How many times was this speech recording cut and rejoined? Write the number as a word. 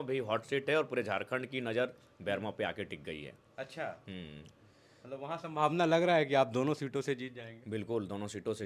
zero